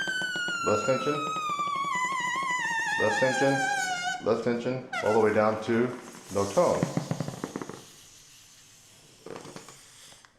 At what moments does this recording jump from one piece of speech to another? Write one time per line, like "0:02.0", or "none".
0:07.2